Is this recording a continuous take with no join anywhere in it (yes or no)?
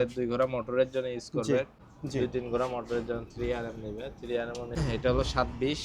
no